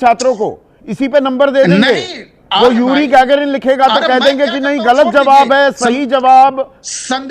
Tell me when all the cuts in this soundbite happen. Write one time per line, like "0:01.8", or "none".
0:01.9